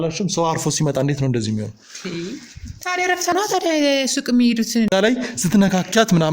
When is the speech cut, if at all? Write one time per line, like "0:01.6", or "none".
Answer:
0:04.9

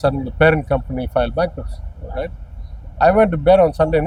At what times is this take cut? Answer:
none

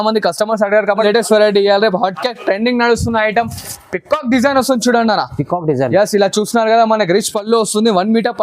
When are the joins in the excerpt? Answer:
0:00.9

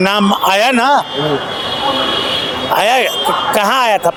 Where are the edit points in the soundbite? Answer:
none

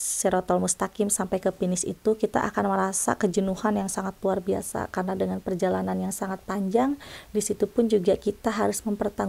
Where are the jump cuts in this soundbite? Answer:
none

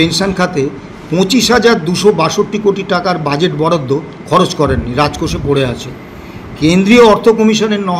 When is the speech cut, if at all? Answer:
none

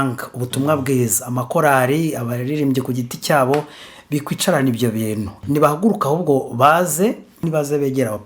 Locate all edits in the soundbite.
0:05.3
0:07.4

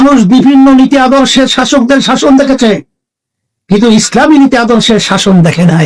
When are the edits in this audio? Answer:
none

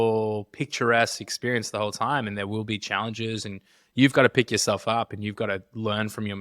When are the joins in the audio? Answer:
0:03.8

